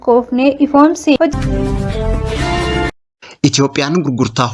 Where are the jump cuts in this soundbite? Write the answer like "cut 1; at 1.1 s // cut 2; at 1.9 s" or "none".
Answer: cut 1; at 1.3 s // cut 2; at 3.1 s